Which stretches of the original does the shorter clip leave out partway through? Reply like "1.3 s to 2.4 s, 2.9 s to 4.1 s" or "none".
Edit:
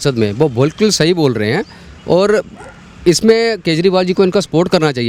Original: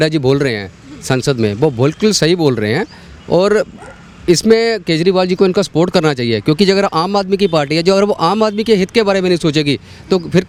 none